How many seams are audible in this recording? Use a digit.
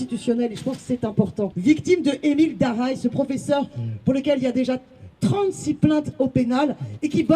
1